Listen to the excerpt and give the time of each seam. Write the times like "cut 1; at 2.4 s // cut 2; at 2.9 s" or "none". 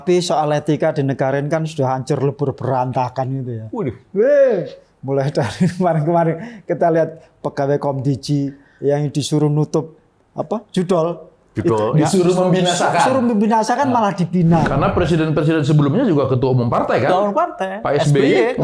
cut 1; at 14.7 s

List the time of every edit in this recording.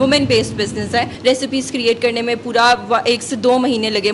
cut 1; at 1.1 s

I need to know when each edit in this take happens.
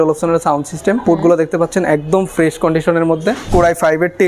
cut 1; at 1.0 s // cut 2; at 3.4 s

